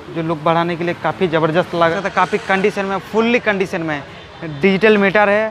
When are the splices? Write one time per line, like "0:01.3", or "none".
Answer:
0:02.0